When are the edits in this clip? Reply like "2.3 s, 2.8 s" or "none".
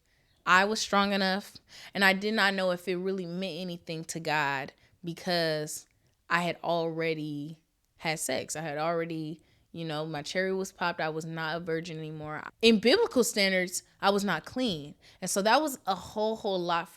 12.4 s